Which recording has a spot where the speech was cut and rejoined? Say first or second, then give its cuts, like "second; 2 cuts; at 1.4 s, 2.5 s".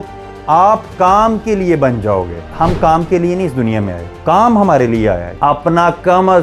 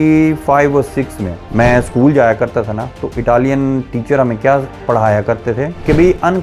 first; 3 cuts; at 2.5 s, 4.1 s, 5.3 s